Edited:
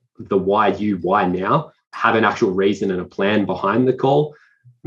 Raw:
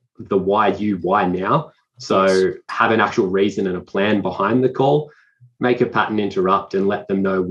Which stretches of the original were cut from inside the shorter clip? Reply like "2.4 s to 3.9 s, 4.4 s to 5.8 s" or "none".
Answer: 1.9 s to 2.6 s